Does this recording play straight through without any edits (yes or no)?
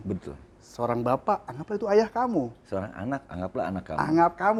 yes